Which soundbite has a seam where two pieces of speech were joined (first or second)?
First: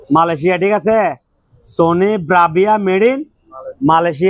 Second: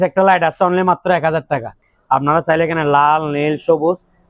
second